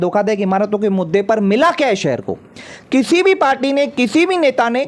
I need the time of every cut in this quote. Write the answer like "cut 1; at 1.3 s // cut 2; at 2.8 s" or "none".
none